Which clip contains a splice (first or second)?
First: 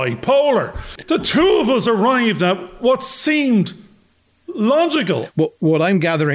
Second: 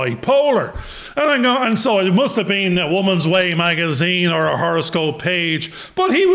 first